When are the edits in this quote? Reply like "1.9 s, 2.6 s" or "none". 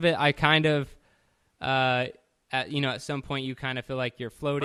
none

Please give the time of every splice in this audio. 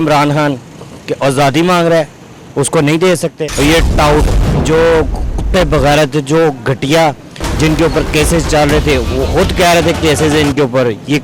3.4 s

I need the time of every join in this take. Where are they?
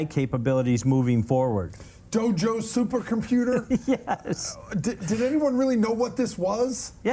none

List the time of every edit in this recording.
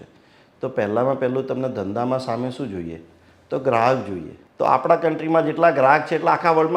none

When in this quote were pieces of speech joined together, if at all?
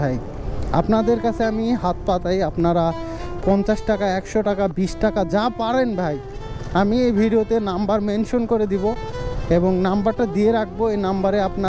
none

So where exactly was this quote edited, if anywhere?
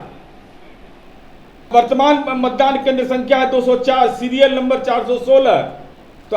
1.7 s

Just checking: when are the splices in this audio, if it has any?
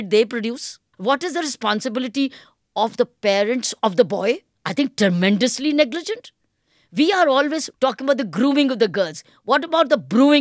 0.9 s, 4.6 s, 7.7 s

